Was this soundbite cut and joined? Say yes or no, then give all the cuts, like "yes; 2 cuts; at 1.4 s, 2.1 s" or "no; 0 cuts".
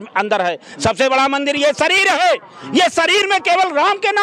no; 0 cuts